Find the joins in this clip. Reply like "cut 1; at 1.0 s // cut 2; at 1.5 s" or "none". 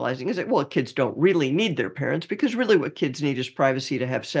none